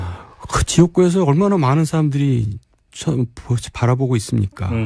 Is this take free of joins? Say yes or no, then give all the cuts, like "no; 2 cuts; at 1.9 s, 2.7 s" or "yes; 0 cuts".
yes; 0 cuts